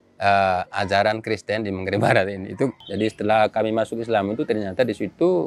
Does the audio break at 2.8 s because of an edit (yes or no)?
yes